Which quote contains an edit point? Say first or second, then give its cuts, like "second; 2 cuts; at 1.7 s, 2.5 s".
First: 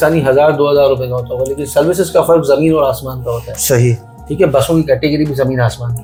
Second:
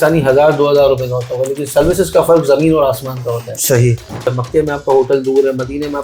second; 1 cut; at 4.3 s